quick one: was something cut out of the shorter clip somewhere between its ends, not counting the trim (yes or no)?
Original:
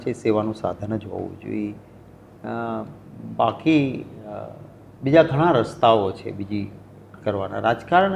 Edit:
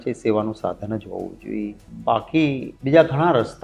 yes